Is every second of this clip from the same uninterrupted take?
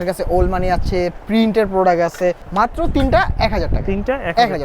no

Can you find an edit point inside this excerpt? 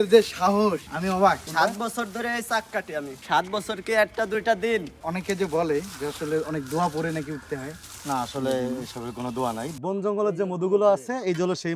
yes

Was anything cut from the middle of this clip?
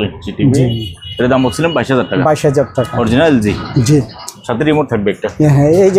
no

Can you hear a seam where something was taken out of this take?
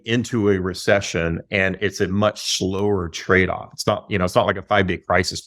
no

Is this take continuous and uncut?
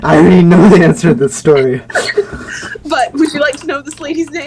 no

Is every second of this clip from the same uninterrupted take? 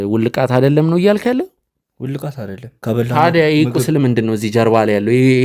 no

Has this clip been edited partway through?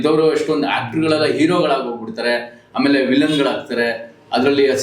no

